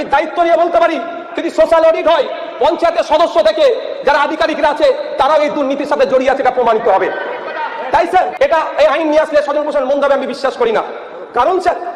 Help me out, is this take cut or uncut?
cut